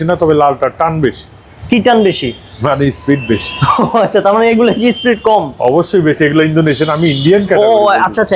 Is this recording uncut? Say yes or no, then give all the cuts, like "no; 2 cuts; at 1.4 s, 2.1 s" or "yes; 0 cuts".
yes; 0 cuts